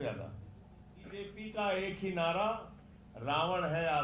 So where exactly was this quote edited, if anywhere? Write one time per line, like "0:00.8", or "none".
0:01.2